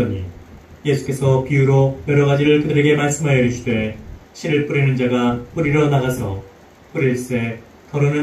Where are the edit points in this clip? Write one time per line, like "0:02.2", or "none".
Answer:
0:05.1

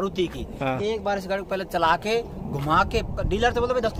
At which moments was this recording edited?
none

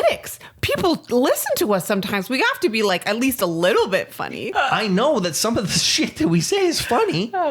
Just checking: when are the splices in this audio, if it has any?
0:04.3

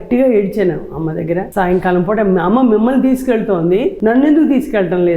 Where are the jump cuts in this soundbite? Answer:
0:01.5
0:03.9

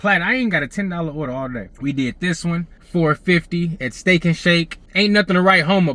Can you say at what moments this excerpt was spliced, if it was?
0:01.7
0:02.8
0:04.8

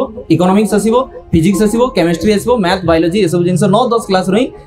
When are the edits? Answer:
none

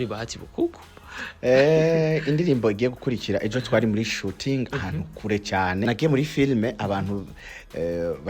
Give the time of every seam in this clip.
0:05.8

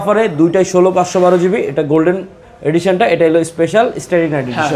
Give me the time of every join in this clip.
none

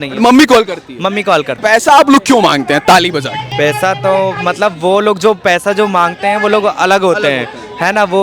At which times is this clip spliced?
0:01.5
0:03.4

